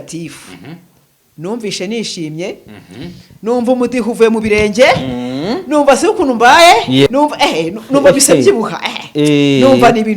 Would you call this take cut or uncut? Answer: cut